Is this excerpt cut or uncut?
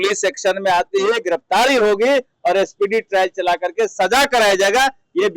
uncut